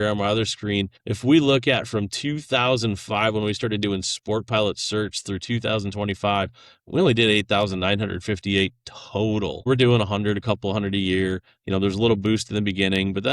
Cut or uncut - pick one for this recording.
cut